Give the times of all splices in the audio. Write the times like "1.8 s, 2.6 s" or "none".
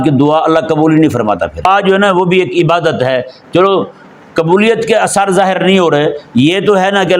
1.6 s